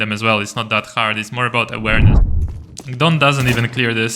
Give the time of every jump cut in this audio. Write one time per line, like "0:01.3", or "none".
0:02.1